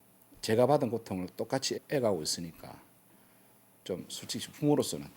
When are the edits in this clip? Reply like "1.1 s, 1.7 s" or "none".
1.8 s